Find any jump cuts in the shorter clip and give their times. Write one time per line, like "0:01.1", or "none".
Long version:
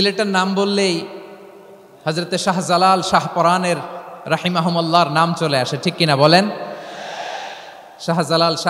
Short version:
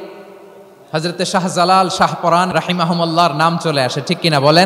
0:02.5